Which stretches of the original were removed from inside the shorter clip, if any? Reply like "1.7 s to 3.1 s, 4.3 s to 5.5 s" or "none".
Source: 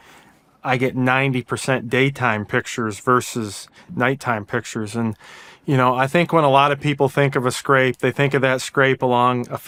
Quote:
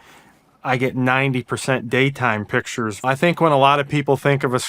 3.0 s to 6.0 s